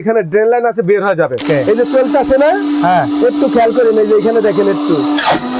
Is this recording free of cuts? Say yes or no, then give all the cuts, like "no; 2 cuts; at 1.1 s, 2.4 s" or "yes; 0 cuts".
no; 1 cut; at 1.4 s